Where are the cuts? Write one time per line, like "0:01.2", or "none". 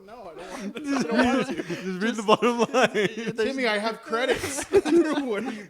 none